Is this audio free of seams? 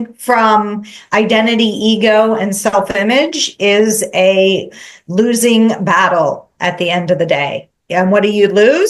yes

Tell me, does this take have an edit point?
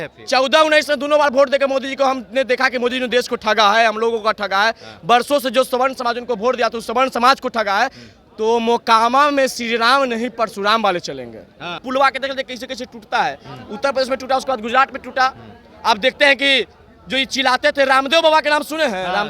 yes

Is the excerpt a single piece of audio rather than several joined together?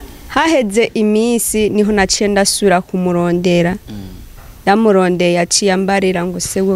yes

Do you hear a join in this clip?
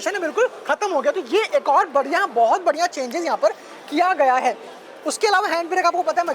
no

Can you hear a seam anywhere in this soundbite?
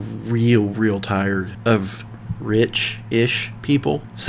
no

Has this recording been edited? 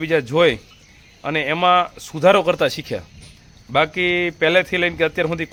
no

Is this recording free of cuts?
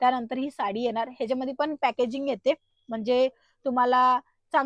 yes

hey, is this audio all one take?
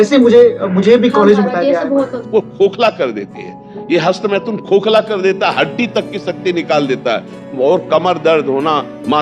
no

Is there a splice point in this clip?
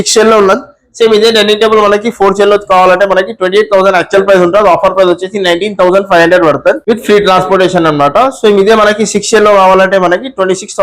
no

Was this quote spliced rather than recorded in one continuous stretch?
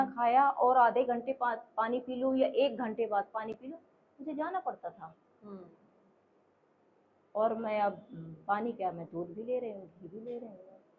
no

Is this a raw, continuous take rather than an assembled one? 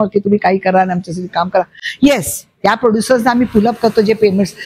yes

